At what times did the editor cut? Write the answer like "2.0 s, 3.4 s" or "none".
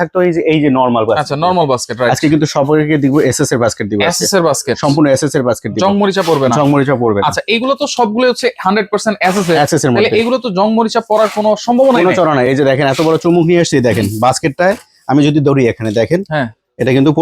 none